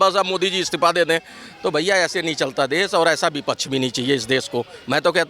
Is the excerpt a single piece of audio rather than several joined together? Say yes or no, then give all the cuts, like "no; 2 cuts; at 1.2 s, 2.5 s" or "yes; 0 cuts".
yes; 0 cuts